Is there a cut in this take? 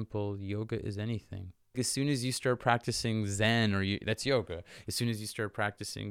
yes; 1 cut; at 1.8 s

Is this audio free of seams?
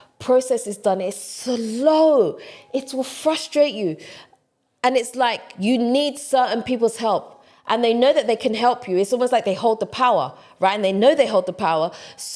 yes; 0 cuts

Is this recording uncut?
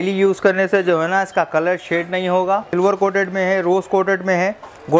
no; 1 cut; at 2.7 s

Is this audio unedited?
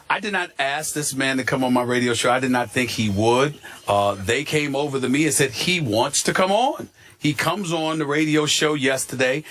yes; 0 cuts

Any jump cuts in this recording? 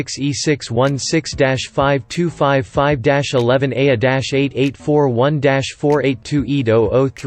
no; 0 cuts

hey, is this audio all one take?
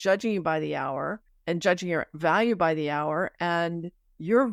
yes; 0 cuts

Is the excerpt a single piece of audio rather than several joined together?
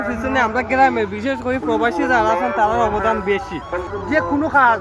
no; 1 cut; at 3.9 s

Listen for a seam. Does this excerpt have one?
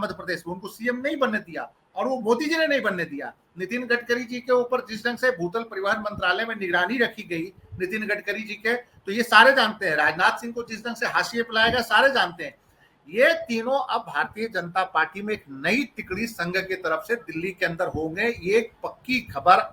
no; 0 cuts

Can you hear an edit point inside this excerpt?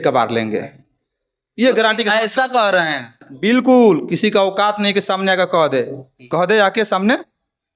no; 0 cuts

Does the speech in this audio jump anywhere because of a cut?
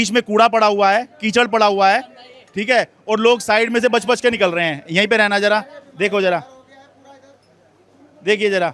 no; 0 cuts

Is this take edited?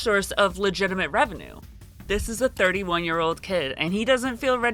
yes; 1 cut; at 1.7 s

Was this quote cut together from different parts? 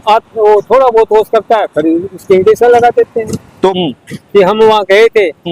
yes; 1 cut; at 3.8 s

